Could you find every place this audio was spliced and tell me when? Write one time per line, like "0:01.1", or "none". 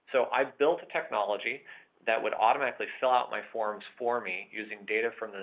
none